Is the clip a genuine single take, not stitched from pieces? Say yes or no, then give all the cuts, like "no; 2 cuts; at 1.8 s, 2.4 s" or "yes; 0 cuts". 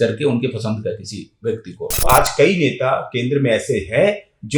no; 1 cut; at 2.1 s